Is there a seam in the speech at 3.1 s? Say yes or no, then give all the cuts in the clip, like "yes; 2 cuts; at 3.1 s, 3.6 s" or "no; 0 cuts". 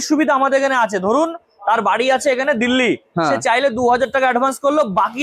no; 0 cuts